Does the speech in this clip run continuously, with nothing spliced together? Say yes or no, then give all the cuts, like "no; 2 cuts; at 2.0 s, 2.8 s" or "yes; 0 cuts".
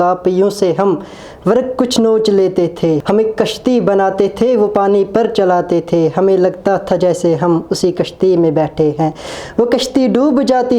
no; 1 cut; at 3.0 s